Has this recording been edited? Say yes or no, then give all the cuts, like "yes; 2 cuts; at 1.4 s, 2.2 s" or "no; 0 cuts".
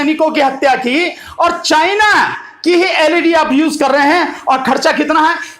no; 0 cuts